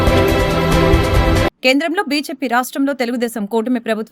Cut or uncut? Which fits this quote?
uncut